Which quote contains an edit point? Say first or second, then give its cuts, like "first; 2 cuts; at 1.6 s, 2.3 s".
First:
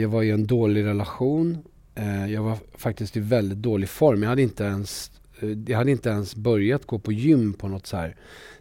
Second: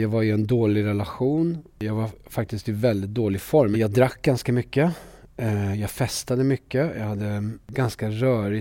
second; 3 cuts; at 1.8 s, 3.8 s, 7.7 s